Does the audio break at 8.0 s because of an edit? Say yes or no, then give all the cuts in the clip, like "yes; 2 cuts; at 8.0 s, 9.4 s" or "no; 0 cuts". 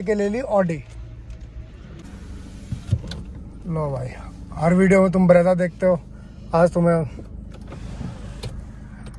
no; 1 cut; at 2.0 s